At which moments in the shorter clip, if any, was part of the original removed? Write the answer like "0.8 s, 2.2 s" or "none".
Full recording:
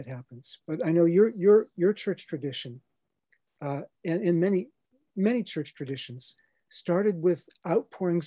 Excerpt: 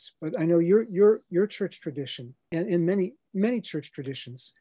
2.4 s, 3.2 s